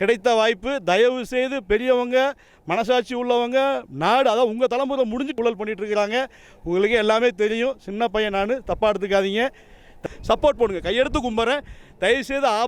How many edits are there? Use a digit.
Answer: 2